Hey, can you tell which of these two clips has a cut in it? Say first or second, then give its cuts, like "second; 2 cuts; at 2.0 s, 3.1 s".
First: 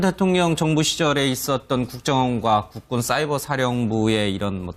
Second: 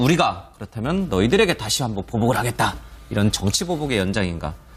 first; 1 cut; at 1.5 s